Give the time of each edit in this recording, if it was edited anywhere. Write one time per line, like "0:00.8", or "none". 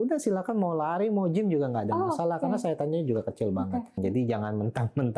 0:04.0